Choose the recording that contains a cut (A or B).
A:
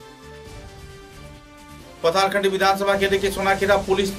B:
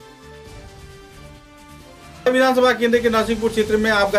B